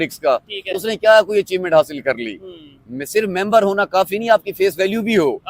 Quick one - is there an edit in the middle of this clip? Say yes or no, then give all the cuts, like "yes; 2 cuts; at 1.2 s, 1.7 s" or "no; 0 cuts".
no; 0 cuts